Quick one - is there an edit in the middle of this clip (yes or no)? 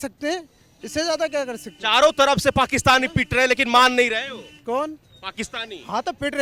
no